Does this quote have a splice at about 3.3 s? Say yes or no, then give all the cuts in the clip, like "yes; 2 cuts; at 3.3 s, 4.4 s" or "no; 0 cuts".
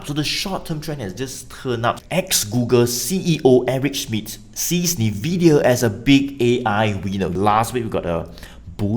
no; 2 cuts; at 2.0 s, 7.3 s